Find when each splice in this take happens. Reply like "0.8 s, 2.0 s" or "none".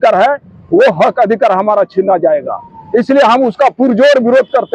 none